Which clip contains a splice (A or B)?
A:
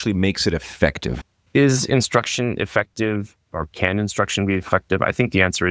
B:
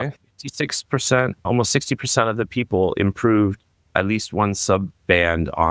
A